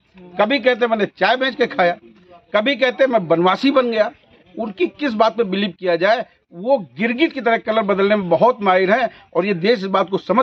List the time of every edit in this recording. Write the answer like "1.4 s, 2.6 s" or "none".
none